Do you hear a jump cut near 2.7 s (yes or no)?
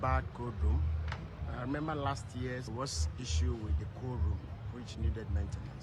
yes